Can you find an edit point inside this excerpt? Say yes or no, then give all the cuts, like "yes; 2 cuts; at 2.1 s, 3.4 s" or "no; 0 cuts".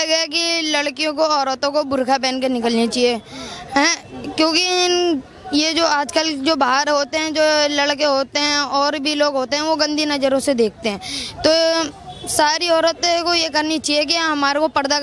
no; 0 cuts